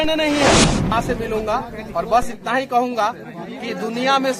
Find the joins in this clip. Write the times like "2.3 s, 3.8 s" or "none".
0.9 s